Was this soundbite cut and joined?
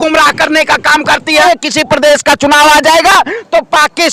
yes; 1 cut; at 1.4 s

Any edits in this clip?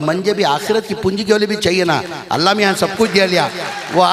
no; 0 cuts

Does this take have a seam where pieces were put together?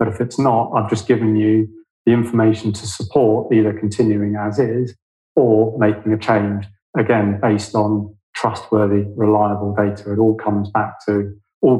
no; 0 cuts

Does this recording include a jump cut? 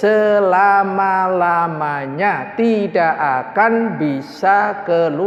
no; 0 cuts

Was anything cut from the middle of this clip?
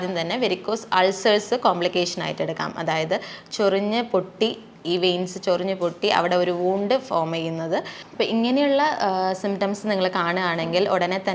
yes; 1 cut; at 8.0 s

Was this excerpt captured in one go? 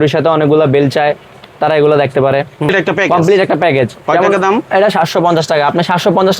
no; 1 cut; at 2.7 s

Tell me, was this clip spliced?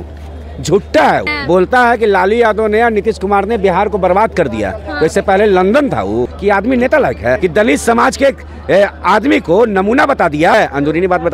yes; 4 cuts; at 1.3 s, 6.3 s, 7.4 s, 10.5 s

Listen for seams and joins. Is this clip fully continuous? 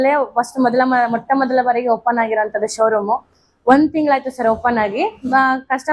yes; 0 cuts

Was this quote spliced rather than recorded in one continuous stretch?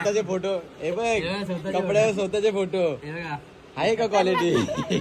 no; 0 cuts

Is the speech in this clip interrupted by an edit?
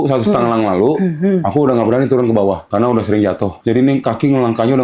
yes; 2 cuts; at 2.6 s, 3.6 s

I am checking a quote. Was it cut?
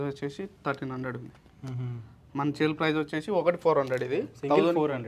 no; 0 cuts

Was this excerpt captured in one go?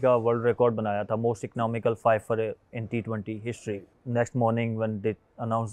no; 1 cut; at 3.9 s

